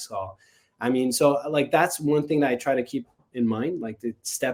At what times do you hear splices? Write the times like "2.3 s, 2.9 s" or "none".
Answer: none